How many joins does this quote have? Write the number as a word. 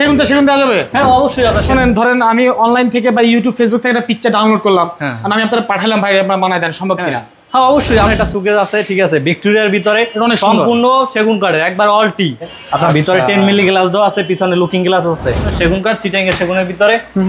four